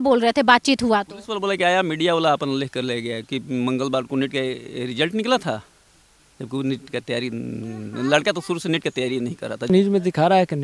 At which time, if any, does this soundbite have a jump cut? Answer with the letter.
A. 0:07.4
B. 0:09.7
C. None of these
B